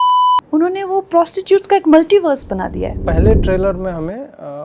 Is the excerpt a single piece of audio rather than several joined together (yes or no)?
no